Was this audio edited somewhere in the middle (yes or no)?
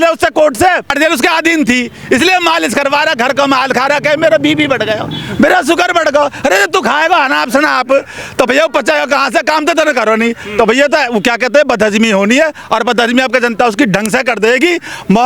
yes